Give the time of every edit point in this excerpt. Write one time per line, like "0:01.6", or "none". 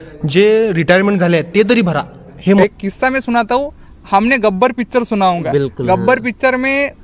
0:02.6